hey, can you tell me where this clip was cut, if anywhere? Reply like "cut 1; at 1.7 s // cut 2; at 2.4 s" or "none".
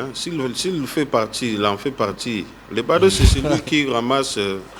none